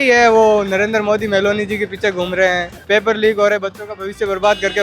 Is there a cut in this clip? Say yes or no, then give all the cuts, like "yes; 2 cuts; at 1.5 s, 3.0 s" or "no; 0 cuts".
yes; 1 cut; at 2.7 s